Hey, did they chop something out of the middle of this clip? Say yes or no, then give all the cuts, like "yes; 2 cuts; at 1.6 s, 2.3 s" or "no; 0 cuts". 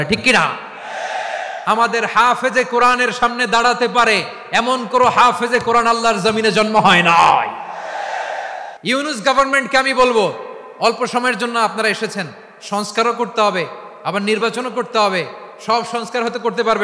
yes; 1 cut; at 8.7 s